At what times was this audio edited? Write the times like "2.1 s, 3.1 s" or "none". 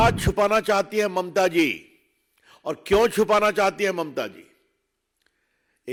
none